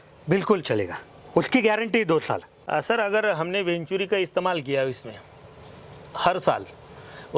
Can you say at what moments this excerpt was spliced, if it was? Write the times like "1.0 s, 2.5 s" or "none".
2.5 s